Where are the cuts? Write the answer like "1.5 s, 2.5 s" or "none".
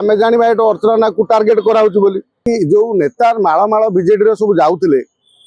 2.4 s